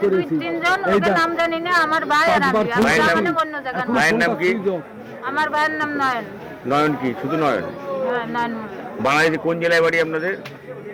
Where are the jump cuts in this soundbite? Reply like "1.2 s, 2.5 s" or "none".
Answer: none

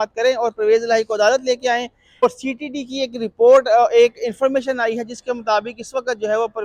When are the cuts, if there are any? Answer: 2.2 s

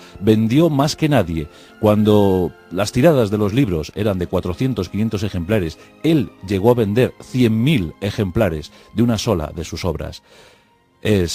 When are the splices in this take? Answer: 3.0 s

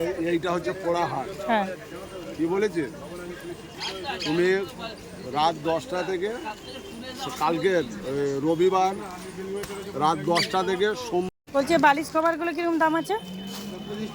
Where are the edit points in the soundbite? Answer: 11.3 s

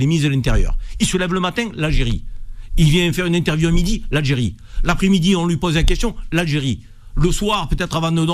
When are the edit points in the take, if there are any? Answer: none

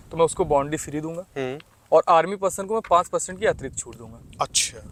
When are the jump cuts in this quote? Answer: none

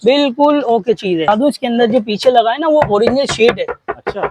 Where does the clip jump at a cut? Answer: 1.3 s

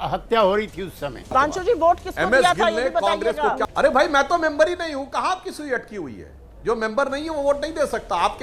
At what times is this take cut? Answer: 1.3 s, 3.6 s

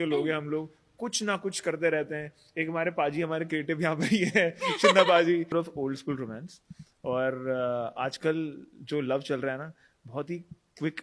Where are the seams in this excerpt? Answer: 5.5 s

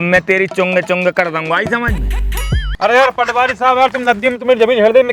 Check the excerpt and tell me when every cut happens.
2.7 s

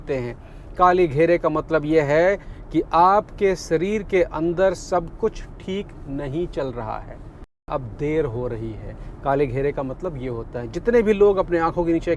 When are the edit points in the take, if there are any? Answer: 7.7 s

